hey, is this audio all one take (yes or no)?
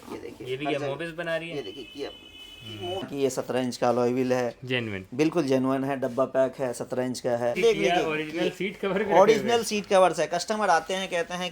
no